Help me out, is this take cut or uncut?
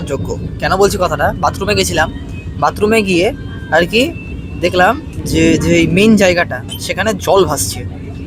uncut